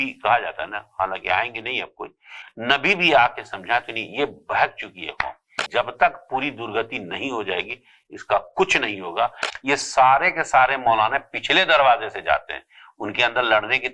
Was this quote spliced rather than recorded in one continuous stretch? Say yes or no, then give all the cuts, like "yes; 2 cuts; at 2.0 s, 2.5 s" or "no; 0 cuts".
yes; 2 cuts; at 5.6 s, 9.5 s